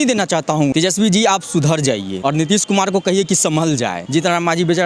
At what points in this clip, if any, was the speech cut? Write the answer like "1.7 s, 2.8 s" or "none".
0.7 s, 2.1 s, 4.0 s